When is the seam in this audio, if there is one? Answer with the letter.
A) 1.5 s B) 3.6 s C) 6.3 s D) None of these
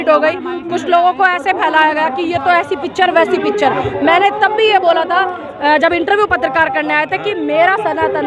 D